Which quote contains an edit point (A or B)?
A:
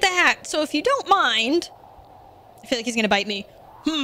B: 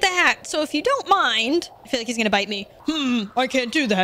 B